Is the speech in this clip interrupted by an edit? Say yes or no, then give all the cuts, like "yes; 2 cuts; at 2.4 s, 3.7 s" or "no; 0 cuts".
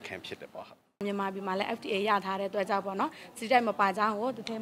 yes; 1 cut; at 1.0 s